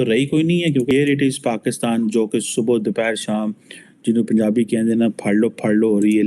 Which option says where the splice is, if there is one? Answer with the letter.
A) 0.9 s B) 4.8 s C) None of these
A